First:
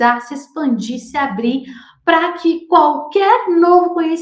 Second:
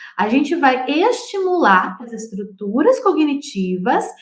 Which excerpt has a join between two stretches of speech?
second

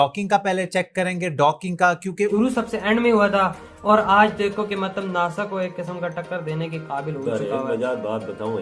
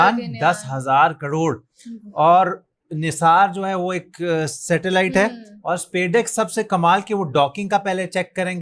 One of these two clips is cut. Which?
first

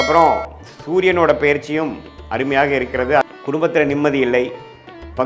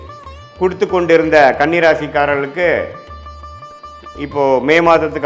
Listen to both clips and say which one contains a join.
first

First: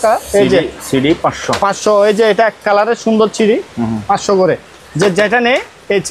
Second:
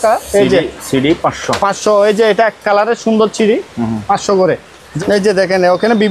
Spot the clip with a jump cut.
second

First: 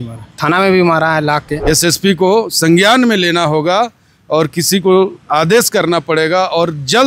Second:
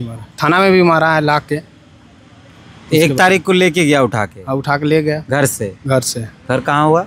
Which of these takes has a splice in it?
first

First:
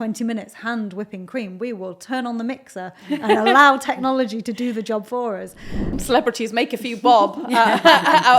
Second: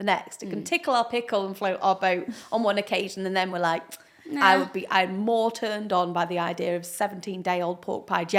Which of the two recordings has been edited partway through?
first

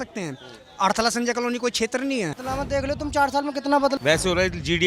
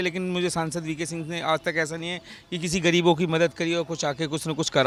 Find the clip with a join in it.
first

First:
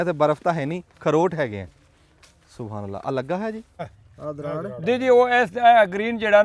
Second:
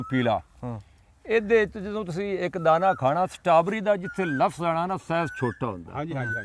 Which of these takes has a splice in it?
first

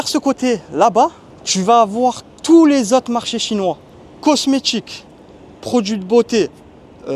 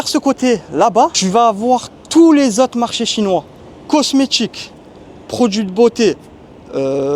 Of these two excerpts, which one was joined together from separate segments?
second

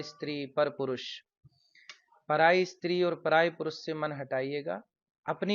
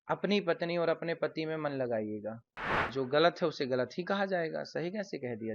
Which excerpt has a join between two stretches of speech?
second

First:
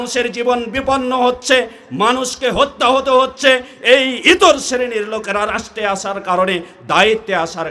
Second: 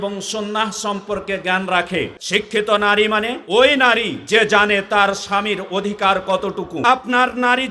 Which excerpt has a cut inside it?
second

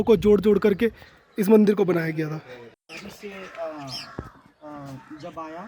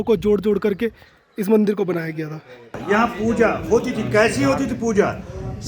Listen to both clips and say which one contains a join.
second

